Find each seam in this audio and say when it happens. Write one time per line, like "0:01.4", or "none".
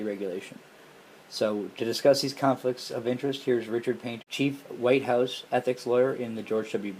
0:04.1